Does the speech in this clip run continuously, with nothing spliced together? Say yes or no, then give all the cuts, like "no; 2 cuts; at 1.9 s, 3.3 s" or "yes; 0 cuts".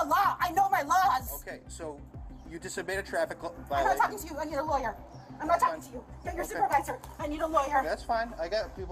yes; 0 cuts